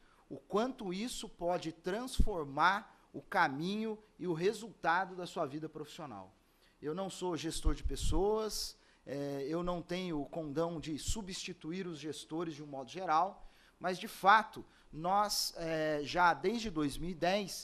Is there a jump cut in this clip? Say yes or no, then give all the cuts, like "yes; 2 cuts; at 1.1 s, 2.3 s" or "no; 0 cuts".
no; 0 cuts